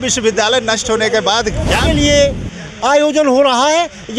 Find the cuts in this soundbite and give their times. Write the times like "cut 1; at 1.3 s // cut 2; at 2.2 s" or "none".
cut 1; at 1.8 s